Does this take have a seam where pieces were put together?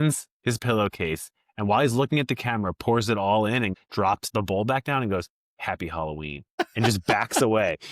yes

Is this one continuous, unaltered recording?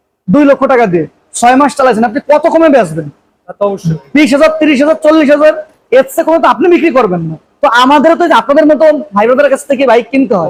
yes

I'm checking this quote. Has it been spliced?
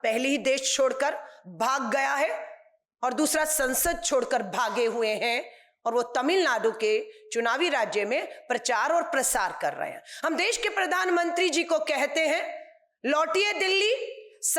no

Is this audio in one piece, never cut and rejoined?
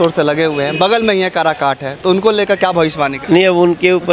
no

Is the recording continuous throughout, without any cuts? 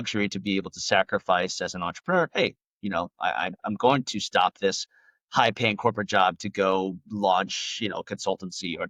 yes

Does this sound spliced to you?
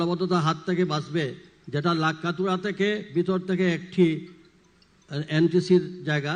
no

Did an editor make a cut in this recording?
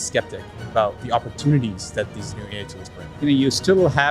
yes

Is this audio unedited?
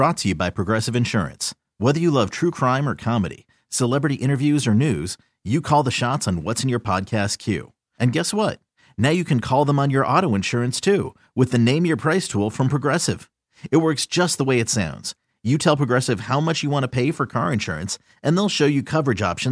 yes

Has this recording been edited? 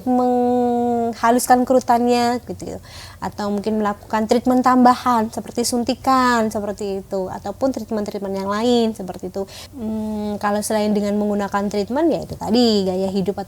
yes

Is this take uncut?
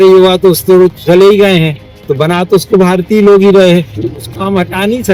yes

